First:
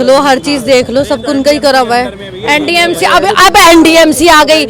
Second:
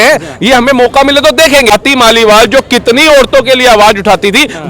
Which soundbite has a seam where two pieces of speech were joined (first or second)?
second